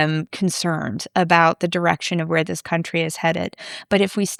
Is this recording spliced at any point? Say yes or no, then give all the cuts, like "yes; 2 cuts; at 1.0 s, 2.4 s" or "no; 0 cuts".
no; 0 cuts